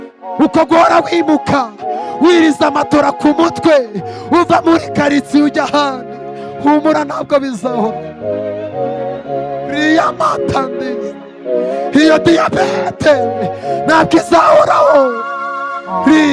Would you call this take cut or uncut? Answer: uncut